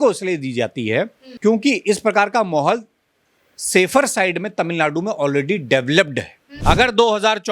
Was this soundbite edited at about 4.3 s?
no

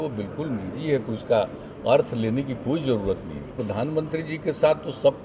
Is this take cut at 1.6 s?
no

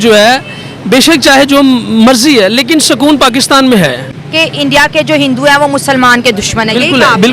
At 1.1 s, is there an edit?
no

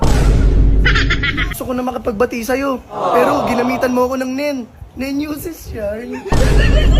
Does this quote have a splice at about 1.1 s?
yes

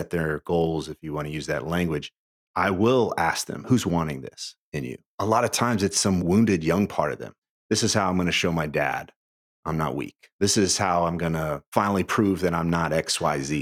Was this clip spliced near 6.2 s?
yes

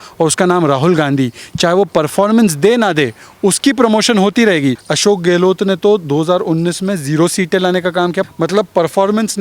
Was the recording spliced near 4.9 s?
yes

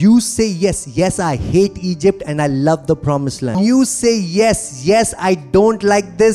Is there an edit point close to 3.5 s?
yes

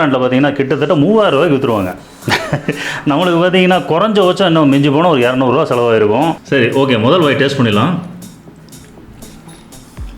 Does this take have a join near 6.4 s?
yes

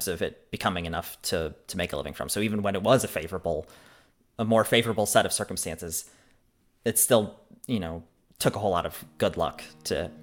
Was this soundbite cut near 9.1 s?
no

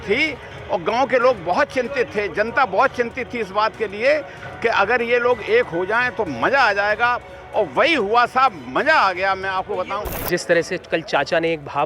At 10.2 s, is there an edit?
yes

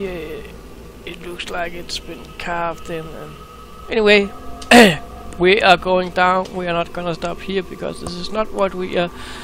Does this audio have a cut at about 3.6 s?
yes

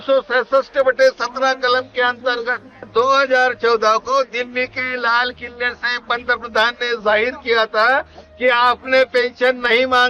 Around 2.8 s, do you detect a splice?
yes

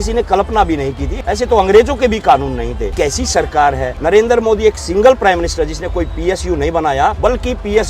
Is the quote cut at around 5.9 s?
no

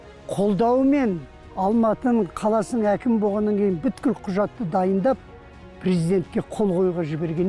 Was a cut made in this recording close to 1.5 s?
yes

